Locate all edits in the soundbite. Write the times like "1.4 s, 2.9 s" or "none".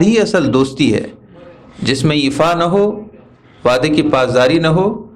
none